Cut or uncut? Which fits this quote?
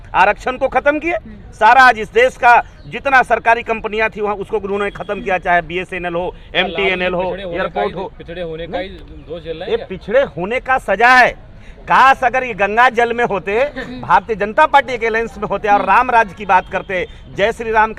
uncut